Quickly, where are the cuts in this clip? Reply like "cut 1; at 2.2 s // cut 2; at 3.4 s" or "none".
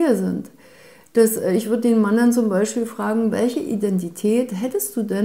none